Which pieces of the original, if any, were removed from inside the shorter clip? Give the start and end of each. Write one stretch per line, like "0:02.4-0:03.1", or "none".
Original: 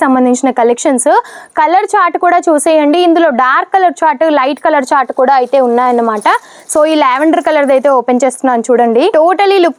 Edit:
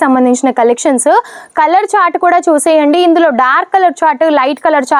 none